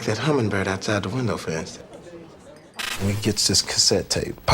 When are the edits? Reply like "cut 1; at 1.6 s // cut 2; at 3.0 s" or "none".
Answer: cut 1; at 2.9 s